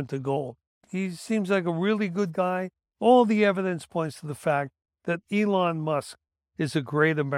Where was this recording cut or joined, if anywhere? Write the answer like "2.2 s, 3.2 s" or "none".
2.8 s

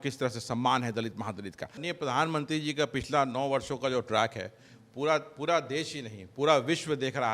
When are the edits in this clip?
1.8 s

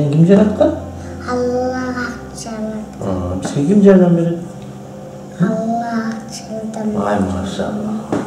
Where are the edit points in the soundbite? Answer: none

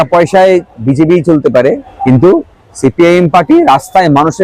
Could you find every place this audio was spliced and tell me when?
1.9 s

